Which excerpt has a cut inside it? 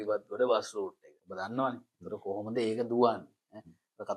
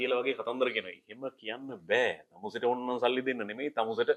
first; 1 cut; at 1.1 s

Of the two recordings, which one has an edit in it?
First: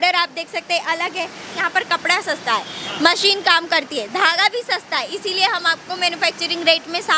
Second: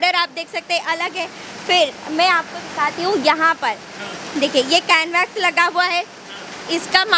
first; 1 cut; at 1.5 s

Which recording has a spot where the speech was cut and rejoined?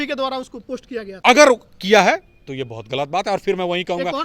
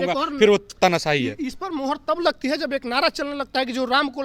first; 1 cut; at 1.1 s

